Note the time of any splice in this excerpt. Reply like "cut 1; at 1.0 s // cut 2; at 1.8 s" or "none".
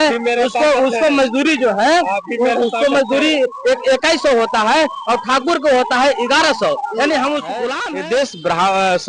cut 1; at 7.7 s